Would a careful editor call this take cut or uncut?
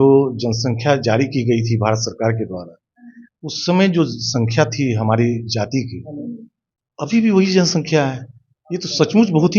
uncut